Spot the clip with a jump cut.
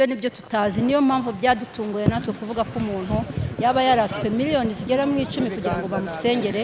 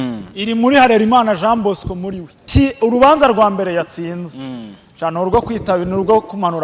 second; 1 cut; at 2.4 s

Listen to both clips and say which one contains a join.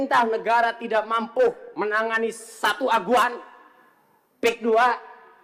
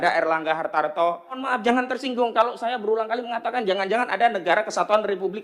second; 1 cut; at 1.4 s

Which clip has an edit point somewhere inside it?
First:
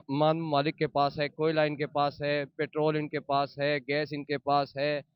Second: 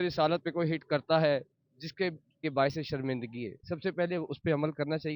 second; 1 cut; at 2.4 s

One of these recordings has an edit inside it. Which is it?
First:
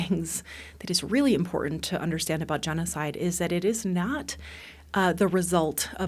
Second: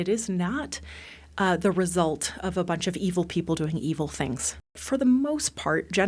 second; 1 cut; at 4.8 s

